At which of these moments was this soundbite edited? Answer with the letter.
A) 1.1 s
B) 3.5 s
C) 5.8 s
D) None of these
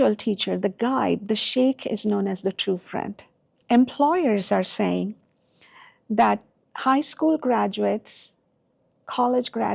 B